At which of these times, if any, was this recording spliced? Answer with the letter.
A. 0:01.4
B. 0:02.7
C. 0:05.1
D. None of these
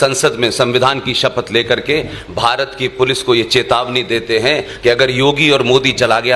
D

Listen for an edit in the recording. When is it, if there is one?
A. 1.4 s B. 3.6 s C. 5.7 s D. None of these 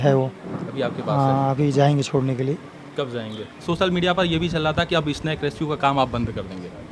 B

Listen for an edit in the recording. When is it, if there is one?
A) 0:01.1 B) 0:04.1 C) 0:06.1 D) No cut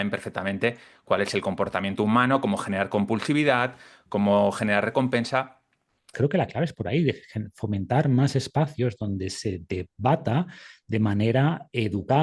C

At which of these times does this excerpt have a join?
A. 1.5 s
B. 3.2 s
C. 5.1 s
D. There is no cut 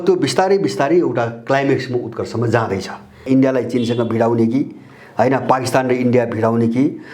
B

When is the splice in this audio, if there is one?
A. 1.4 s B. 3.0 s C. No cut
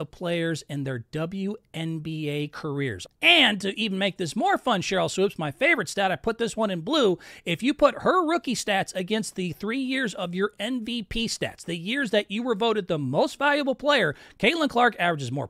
B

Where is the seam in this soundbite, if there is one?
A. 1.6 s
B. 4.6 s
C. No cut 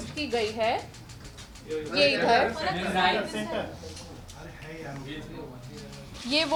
C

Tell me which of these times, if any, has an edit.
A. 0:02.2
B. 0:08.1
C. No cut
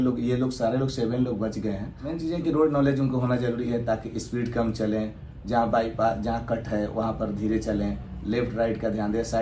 A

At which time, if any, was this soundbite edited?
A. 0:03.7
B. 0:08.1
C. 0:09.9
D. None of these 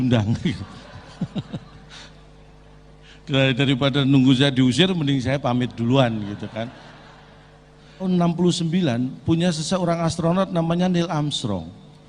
B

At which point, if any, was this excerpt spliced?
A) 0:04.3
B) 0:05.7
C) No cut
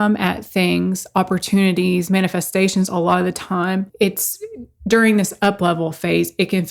C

